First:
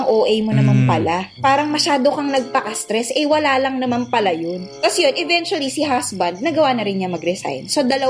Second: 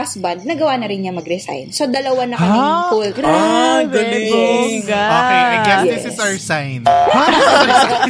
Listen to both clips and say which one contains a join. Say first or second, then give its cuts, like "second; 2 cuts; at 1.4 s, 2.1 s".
first; 2 cuts; at 1.3 s, 4.7 s